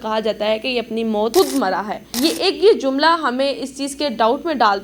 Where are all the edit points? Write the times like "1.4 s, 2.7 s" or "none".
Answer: 1.3 s, 2.0 s